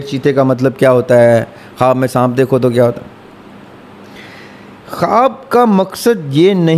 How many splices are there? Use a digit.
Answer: 0